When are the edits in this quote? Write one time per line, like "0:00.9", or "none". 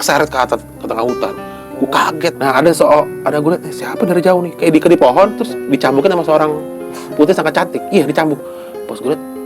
0:02.4